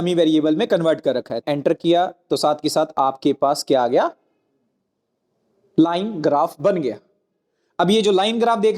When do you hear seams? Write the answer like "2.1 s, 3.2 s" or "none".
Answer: 1.4 s